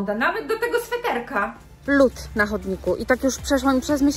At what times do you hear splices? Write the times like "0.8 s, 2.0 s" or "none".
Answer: 1.7 s